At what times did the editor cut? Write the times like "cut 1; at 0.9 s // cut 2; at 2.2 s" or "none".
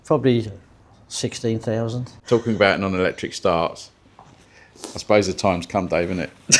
cut 1; at 2.1 s